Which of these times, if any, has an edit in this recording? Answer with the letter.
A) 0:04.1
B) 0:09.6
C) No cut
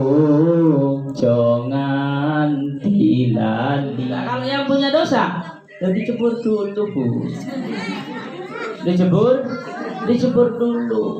A